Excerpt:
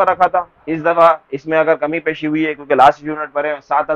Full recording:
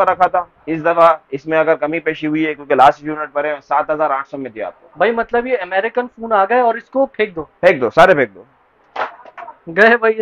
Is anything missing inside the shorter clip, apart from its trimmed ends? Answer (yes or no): no